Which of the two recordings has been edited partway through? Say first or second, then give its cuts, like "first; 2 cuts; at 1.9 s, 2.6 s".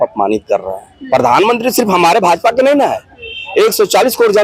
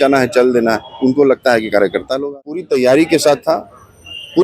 second; 1 cut; at 2.6 s